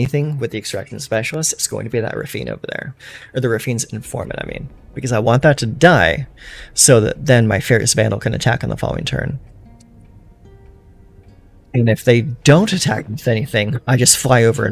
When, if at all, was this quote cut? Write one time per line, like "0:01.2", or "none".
none